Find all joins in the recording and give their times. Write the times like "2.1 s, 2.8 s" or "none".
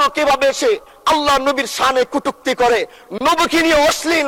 none